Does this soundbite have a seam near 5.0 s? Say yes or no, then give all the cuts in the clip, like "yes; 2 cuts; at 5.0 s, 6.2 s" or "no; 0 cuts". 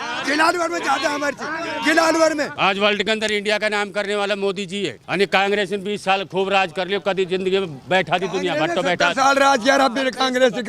yes; 2 cuts; at 2.5 s, 5.0 s